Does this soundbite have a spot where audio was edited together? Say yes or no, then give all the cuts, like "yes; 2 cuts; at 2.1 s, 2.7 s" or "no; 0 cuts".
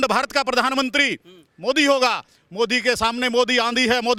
no; 0 cuts